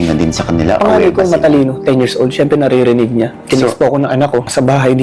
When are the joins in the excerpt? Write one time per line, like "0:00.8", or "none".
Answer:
none

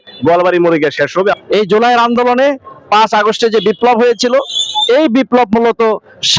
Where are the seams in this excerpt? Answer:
0:01.4

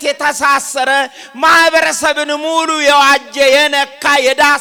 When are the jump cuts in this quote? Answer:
none

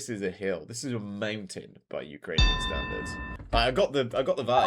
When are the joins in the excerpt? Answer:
0:03.2

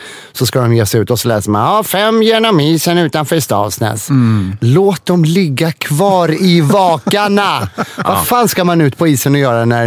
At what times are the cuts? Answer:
none

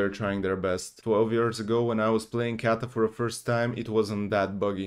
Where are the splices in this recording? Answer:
0:00.9

